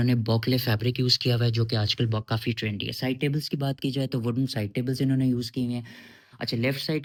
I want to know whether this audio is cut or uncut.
uncut